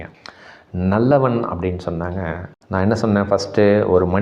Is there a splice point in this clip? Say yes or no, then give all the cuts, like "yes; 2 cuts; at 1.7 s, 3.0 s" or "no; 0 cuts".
yes; 1 cut; at 2.6 s